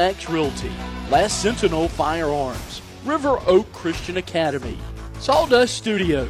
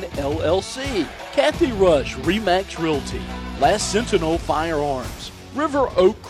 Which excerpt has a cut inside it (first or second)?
second